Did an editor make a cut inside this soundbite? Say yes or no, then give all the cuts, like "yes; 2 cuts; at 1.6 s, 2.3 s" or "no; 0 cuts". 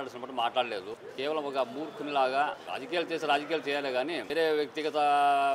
yes; 3 cuts; at 1.0 s, 2.6 s, 4.2 s